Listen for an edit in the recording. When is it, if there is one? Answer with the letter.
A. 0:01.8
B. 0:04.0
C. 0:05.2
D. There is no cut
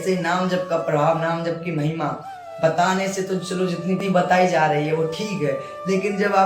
B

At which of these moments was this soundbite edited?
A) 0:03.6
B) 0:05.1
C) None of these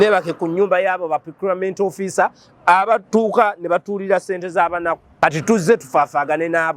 B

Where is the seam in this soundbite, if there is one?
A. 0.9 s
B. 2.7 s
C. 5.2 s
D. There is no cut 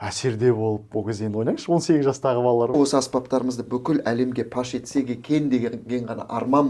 B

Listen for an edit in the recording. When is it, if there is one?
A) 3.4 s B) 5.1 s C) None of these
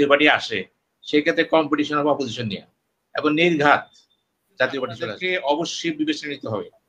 B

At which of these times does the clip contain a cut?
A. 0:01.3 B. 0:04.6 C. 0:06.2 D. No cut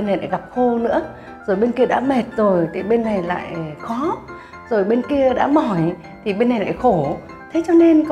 D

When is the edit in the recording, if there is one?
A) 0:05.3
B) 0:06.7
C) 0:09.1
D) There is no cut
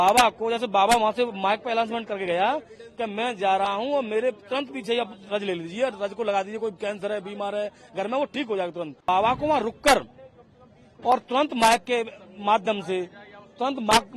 C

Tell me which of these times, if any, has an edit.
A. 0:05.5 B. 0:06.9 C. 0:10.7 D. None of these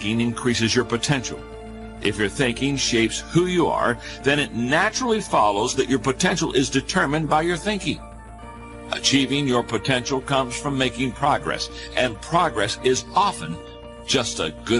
A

